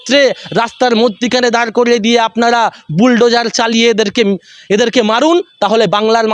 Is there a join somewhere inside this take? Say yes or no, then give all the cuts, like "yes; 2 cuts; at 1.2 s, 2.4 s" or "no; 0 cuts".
no; 0 cuts